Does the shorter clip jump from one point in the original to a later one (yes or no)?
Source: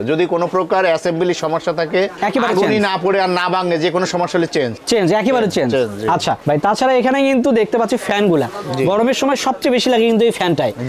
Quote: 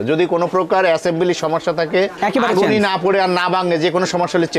no